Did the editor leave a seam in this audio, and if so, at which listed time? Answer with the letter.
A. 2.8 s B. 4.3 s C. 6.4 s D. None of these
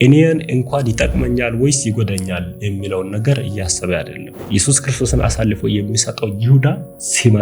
B